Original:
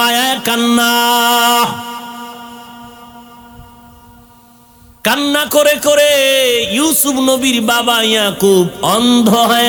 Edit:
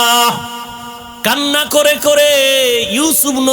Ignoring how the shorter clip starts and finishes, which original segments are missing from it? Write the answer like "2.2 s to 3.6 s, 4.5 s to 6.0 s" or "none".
2.4 s to 4.9 s